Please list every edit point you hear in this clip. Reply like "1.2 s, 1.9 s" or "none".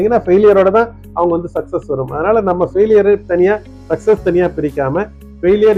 none